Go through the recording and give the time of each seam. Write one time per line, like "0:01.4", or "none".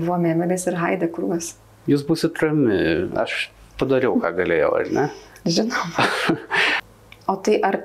0:01.7
0:06.8